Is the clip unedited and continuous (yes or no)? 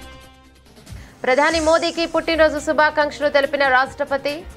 no